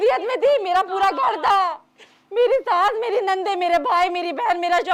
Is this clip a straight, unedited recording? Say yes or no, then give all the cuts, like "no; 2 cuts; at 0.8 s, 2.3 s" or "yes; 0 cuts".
yes; 0 cuts